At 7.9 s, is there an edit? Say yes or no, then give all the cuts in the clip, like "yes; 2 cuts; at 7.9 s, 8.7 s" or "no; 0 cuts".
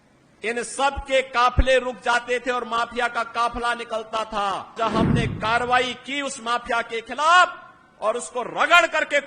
no; 1 cut; at 4.8 s